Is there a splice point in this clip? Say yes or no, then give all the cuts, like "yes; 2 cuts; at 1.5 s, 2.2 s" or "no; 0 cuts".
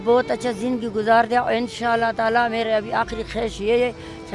no; 0 cuts